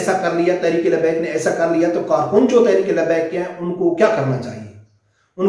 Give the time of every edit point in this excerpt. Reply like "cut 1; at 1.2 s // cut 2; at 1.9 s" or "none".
none